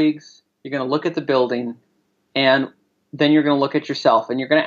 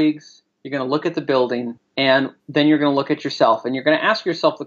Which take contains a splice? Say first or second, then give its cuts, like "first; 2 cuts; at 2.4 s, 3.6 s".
second; 1 cut; at 2.2 s